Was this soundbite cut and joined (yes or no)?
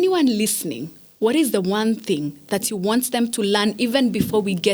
no